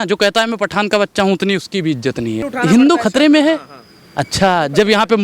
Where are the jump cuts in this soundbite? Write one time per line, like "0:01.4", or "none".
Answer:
0:02.5